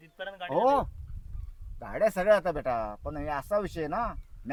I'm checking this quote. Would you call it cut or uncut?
uncut